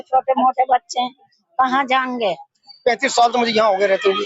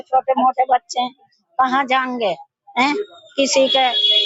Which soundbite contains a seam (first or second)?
first